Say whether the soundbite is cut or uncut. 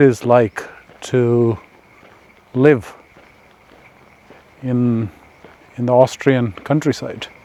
uncut